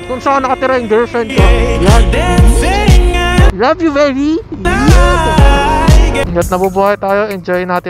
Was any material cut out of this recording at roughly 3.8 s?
no; 1 cut; at 6.3 s

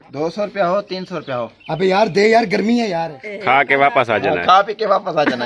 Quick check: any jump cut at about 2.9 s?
yes; 1 cut; at 2.9 s

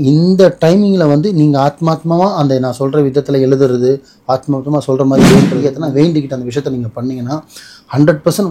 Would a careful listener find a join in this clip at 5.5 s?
yes; 1 cut; at 5.5 s

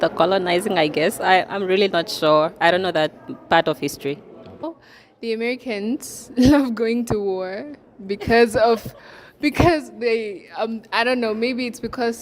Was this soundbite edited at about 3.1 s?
no; 1 cut; at 4.7 s

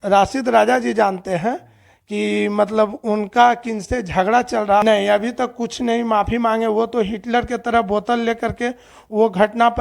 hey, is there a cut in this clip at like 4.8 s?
yes; 1 cut; at 4.8 s

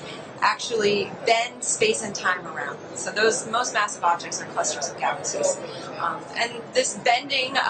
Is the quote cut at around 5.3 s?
no; 1 cut; at 1.3 s

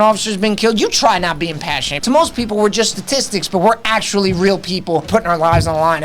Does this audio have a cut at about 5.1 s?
yes; 2 cuts; at 1.9 s, 5.1 s

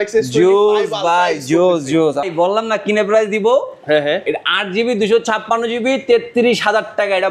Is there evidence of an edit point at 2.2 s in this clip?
yes; 1 cut; at 2.2 s

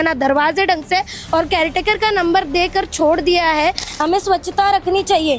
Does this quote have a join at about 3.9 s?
yes; 1 cut; at 3.9 s

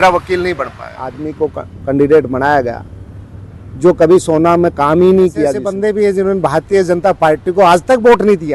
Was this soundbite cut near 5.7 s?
yes; 2 cuts; at 1.2 s, 5.7 s

